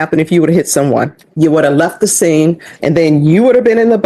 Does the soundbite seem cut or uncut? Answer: cut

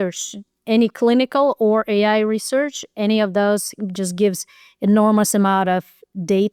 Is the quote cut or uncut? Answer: uncut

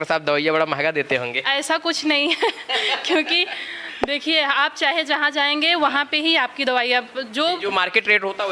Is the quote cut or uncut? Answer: uncut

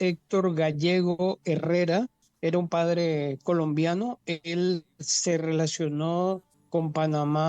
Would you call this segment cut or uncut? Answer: cut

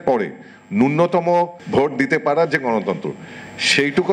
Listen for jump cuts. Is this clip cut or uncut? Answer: cut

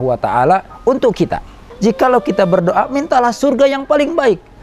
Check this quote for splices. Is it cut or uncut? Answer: cut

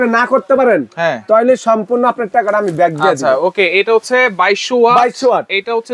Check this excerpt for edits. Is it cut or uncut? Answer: uncut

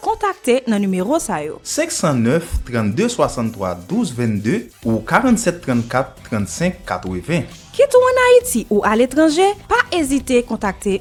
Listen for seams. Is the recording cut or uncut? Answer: uncut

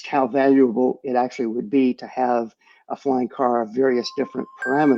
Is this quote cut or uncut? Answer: uncut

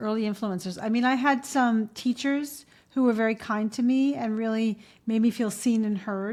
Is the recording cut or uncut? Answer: uncut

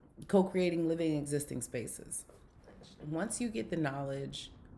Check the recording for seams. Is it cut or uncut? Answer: cut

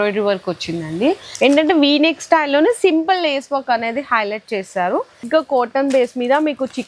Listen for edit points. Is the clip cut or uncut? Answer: cut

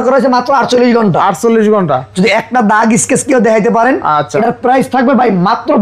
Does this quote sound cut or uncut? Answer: uncut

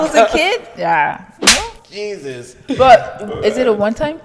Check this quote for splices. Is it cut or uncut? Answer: uncut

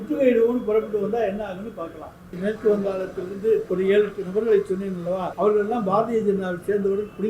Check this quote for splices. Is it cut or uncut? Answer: cut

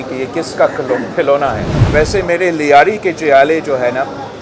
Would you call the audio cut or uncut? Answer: cut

